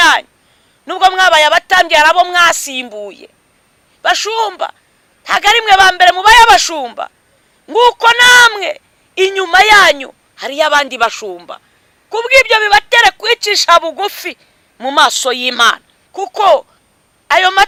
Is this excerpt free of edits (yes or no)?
yes